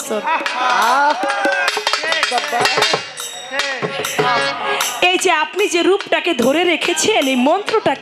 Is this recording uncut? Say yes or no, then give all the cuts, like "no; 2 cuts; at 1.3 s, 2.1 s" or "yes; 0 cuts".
yes; 0 cuts